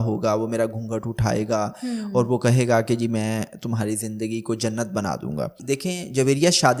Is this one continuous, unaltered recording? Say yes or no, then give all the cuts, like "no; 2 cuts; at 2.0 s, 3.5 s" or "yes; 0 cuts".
no; 1 cut; at 5.6 s